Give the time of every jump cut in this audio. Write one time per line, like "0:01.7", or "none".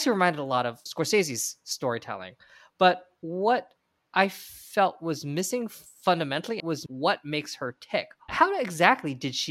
0:06.6
0:08.3